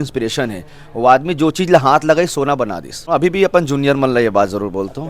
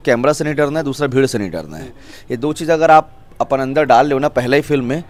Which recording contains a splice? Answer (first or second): first